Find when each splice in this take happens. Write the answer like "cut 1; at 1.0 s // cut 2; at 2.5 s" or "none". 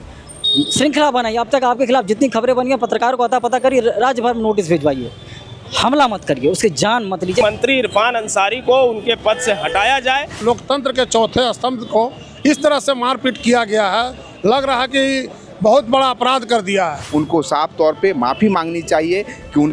cut 1; at 7.4 s // cut 2; at 10.4 s // cut 3; at 17.0 s

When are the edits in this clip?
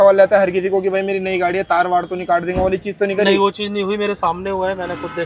none

